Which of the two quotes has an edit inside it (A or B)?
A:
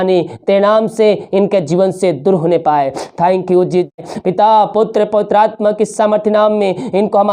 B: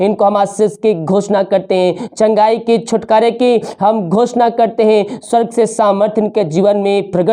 A